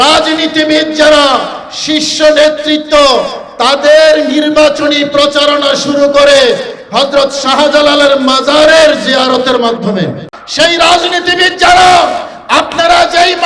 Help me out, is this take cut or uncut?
cut